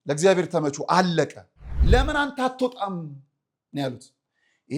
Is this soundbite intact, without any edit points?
no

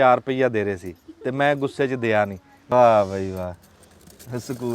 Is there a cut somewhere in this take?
yes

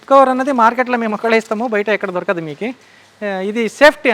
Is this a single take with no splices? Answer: yes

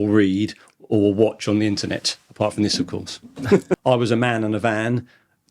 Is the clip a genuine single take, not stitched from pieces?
no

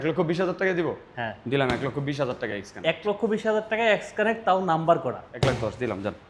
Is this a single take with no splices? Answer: no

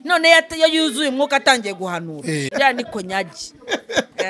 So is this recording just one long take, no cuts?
no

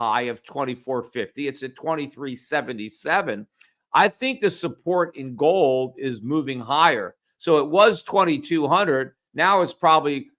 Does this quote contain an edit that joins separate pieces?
no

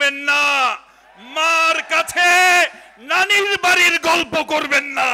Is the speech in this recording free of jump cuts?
yes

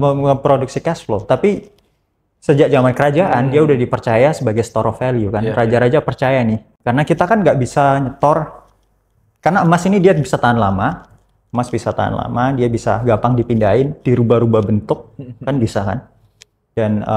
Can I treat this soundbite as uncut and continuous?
yes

